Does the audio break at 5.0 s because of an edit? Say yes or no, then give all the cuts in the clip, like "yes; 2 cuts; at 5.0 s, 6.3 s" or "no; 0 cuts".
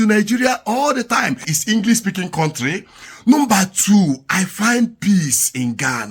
no; 1 cut; at 1.5 s